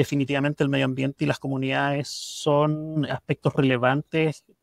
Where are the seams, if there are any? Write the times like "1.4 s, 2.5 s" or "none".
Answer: none